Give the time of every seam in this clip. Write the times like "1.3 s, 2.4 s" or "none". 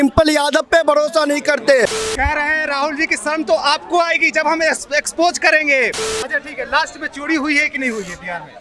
2.0 s, 6.1 s